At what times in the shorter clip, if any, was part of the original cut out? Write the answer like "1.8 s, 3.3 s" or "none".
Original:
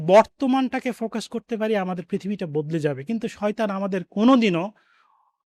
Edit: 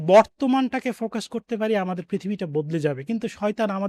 none